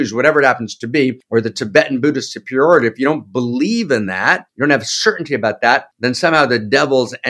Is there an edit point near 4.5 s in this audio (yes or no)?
yes